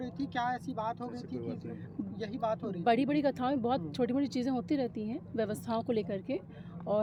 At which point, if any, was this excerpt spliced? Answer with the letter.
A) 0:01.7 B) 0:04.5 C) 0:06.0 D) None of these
D